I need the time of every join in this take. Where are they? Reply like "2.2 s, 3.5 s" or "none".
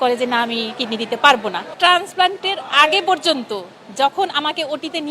1.7 s